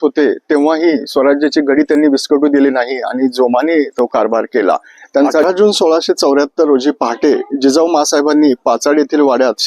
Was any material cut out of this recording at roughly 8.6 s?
no; 1 cut; at 5.4 s

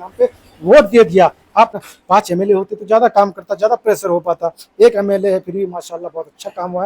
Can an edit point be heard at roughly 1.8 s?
yes; 1 cut; at 1.8 s

